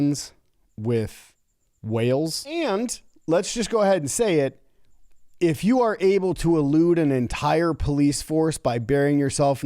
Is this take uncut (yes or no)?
no